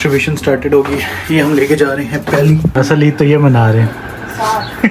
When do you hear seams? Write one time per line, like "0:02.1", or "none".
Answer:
0:02.7

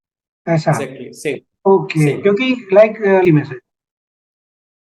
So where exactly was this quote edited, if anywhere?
0:03.2

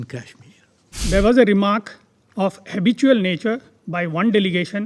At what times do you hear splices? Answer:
0:00.9

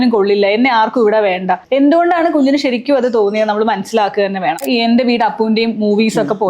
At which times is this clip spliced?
0:01.6
0:04.6

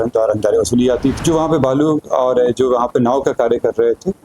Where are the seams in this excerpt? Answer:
0:01.2

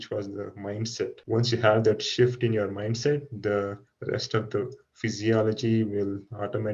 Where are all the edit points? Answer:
0:01.2

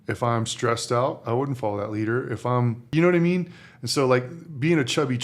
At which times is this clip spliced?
0:02.9

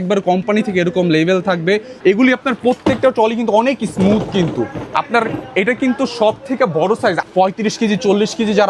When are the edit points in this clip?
0:01.9
0:07.2

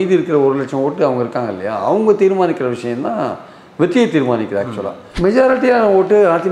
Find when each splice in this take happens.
0:05.1

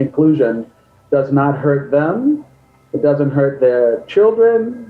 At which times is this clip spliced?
none

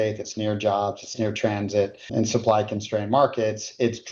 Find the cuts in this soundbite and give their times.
0:02.1

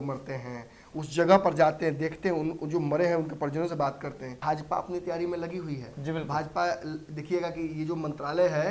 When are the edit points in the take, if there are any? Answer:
0:04.3

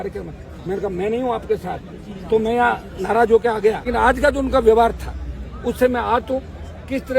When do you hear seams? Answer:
0:03.8

